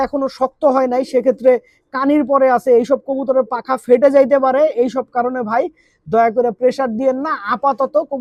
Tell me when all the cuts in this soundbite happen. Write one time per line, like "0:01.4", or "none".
none